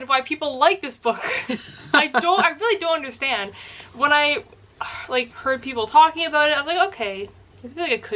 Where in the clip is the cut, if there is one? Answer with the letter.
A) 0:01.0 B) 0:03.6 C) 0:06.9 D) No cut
D